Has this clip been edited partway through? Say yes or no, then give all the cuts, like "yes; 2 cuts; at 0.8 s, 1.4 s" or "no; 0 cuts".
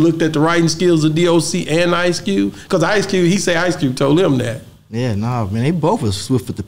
no; 0 cuts